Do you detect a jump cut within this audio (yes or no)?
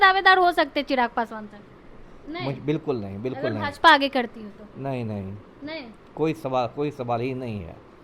no